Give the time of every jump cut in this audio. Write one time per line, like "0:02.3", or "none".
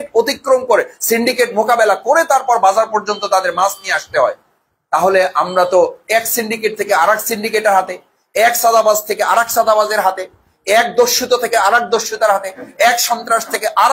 none